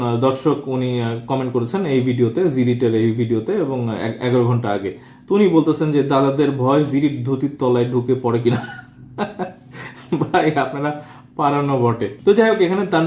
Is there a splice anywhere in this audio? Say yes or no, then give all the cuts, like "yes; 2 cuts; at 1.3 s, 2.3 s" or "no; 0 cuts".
no; 0 cuts